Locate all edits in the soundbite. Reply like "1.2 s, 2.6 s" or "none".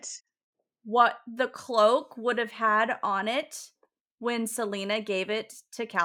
none